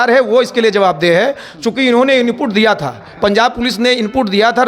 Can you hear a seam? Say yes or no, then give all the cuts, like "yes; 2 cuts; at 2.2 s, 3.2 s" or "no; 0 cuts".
no; 0 cuts